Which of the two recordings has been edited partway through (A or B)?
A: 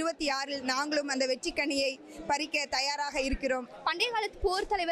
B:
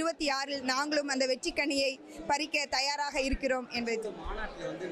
A